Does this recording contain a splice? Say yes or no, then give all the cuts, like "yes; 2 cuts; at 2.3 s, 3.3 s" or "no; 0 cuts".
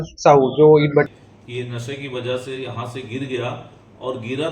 yes; 1 cut; at 1.1 s